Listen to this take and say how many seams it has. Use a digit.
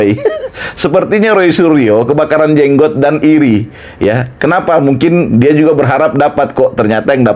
0